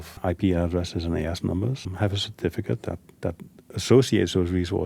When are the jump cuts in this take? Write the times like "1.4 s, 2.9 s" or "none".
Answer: 1.9 s